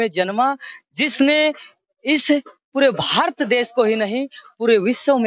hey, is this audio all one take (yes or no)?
yes